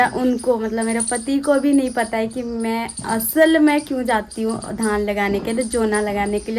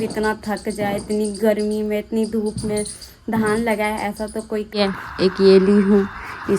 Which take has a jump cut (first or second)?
second